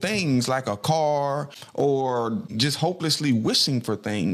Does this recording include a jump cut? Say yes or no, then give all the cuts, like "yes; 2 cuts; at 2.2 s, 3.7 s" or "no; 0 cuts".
yes; 2 cuts; at 1.6 s, 2.6 s